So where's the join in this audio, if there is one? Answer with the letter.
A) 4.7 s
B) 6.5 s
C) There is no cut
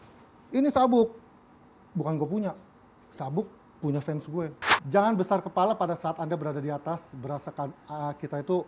A